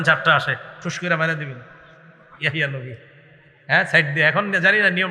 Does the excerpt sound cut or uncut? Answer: uncut